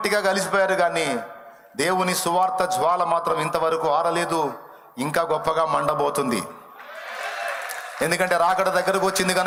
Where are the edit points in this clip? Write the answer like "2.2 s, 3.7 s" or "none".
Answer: none